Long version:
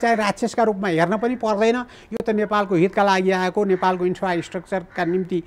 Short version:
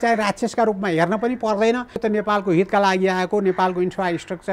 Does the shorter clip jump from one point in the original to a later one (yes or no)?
yes